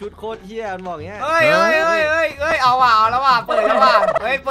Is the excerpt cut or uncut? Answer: uncut